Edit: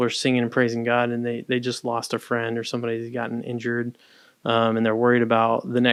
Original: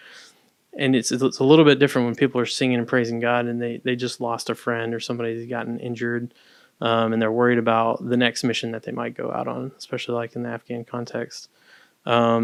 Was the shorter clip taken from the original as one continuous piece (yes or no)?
yes